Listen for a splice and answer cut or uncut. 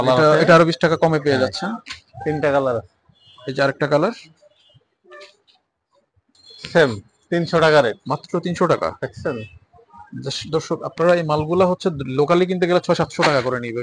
uncut